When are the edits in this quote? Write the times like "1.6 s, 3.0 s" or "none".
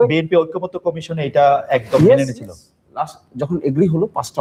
none